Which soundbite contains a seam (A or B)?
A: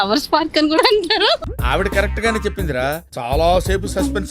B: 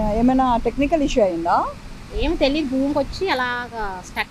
A